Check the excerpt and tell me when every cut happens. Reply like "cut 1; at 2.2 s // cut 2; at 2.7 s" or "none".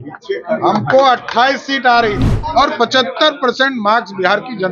cut 1; at 2.3 s

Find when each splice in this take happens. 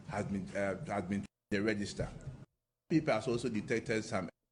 none

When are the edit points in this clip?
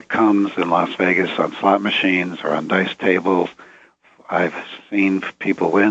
none

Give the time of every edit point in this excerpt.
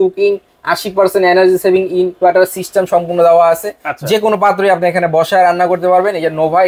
none

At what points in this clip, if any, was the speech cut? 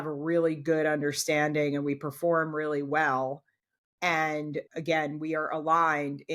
none

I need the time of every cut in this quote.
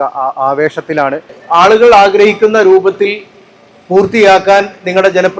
cut 1; at 1.3 s

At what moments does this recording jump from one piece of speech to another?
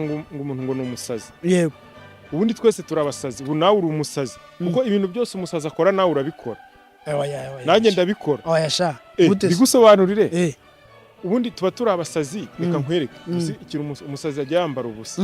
none

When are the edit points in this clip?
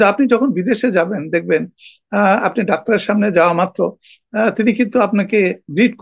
none

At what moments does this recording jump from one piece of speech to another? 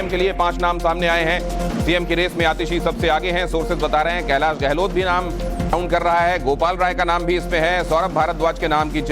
cut 1; at 6.0 s

